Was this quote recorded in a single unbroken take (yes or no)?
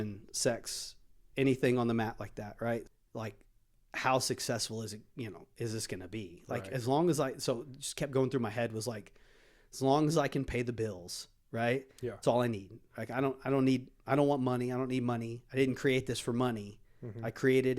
no